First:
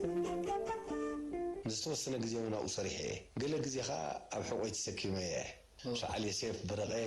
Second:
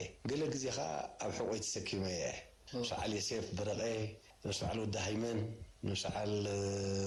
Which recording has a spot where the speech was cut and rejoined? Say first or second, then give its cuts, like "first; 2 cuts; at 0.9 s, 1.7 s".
first; 1 cut; at 1.6 s